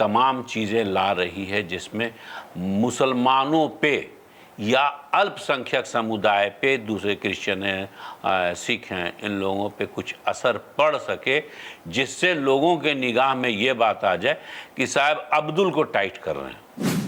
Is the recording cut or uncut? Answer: uncut